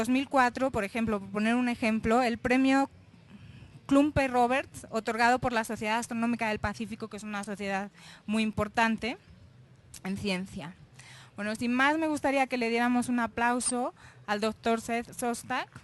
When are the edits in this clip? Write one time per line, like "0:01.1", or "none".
0:12.7